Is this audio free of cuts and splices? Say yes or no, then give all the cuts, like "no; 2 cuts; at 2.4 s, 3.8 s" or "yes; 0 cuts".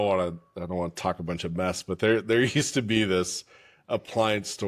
yes; 0 cuts